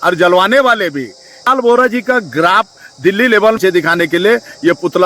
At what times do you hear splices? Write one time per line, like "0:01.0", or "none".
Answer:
0:01.5
0:03.6

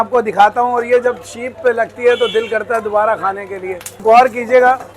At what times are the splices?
0:04.0

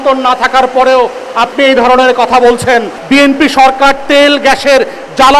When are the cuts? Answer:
0:02.9

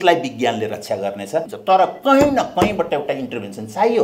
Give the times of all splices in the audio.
0:01.5

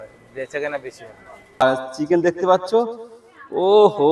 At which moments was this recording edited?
0:01.8

